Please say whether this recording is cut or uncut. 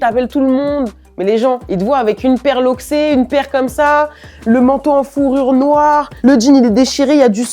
uncut